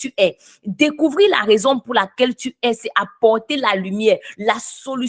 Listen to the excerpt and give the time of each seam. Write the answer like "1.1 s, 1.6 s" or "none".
none